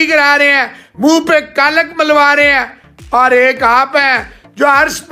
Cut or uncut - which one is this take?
uncut